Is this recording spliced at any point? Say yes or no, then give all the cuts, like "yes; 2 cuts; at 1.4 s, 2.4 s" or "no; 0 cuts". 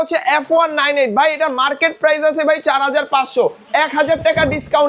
no; 0 cuts